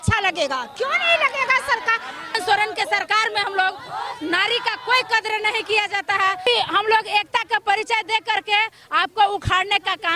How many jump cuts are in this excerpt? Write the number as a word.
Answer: two